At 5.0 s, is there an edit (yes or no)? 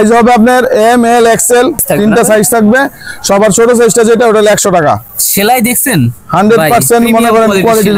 no